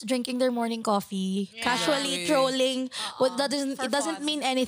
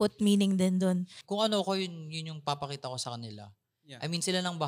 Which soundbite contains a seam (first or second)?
second